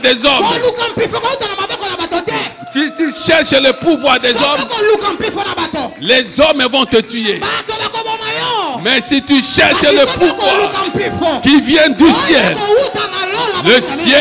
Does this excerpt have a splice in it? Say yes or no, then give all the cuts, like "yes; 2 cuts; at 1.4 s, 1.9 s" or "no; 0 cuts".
no; 0 cuts